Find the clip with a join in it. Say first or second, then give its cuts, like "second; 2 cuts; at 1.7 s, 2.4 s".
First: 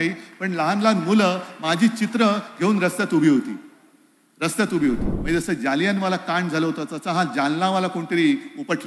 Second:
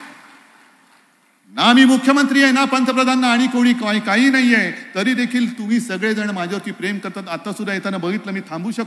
first; 1 cut; at 5.1 s